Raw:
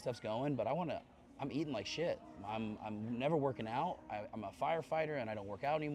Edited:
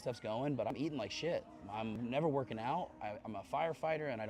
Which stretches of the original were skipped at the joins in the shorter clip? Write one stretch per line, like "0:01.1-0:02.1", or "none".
0:00.7-0:01.4
0:02.7-0:03.1